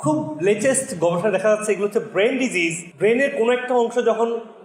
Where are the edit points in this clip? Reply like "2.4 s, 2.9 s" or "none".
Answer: none